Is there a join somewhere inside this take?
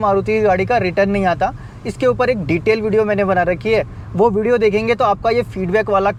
no; 0 cuts

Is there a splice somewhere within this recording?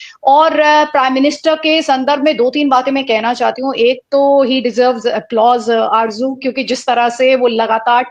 no; 0 cuts

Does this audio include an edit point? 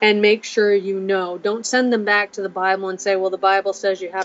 no; 0 cuts

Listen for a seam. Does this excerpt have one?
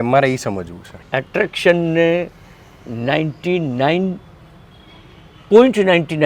yes; 1 cut; at 1.0 s

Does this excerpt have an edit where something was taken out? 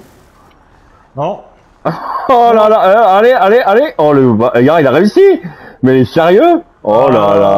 no; 0 cuts

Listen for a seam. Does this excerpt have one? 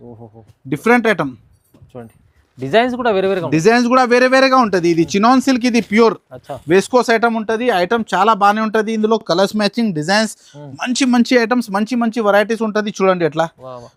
no; 0 cuts

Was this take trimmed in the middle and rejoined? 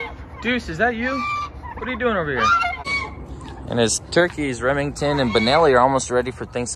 no; 0 cuts

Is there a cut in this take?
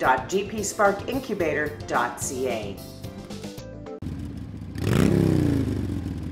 yes; 1 cut; at 4.0 s

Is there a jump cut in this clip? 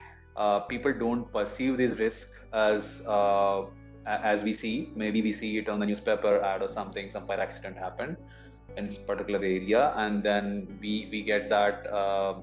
no; 0 cuts

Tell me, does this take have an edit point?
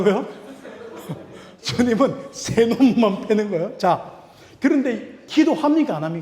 yes; 1 cut; at 5.2 s

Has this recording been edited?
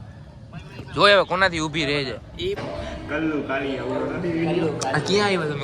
yes; 1 cut; at 2.6 s

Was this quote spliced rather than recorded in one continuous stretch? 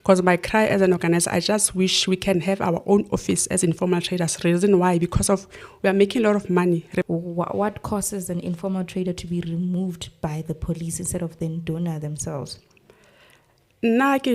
yes; 1 cut; at 7.0 s

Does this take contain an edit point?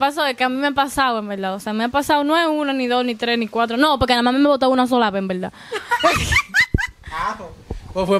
no; 0 cuts

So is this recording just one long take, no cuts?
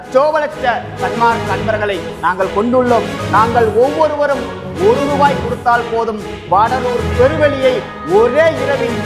yes; 0 cuts

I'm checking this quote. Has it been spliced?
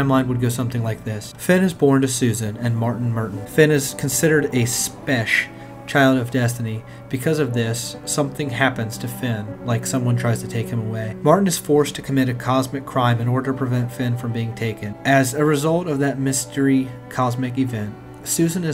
no; 0 cuts

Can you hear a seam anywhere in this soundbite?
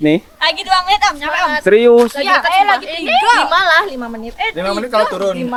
no; 0 cuts

